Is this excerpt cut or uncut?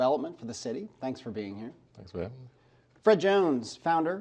uncut